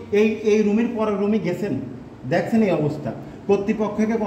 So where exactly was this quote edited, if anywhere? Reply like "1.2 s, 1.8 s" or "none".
none